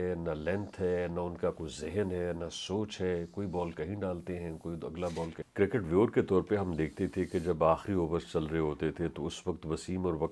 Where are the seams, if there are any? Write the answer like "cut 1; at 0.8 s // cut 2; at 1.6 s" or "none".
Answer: cut 1; at 5.4 s